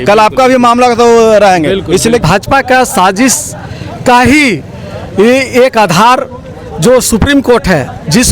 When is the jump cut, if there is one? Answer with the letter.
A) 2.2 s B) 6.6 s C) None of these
A